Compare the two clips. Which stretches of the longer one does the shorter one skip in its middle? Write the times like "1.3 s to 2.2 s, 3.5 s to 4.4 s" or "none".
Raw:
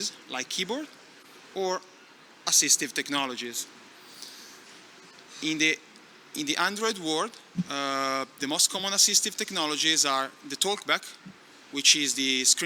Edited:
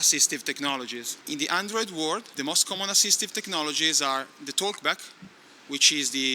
3.6 s to 6.2 s, 7.4 s to 8.3 s